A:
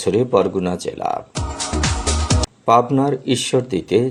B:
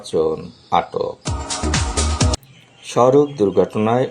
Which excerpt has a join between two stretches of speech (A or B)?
B